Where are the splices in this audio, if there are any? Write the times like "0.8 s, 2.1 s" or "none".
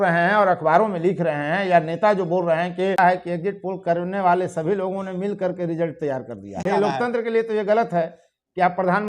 3.0 s, 6.6 s